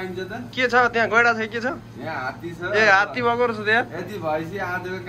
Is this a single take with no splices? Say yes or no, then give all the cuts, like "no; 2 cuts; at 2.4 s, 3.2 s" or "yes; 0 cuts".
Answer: yes; 0 cuts